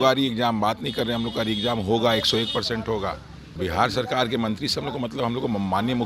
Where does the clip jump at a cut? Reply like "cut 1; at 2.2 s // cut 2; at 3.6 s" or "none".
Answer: cut 1; at 3.6 s